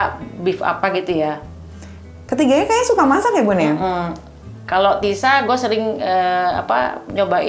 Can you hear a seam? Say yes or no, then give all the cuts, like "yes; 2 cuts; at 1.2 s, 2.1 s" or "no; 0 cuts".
no; 0 cuts